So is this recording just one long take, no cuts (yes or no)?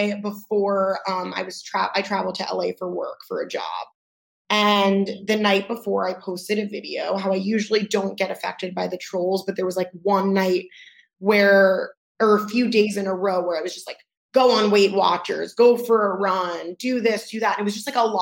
yes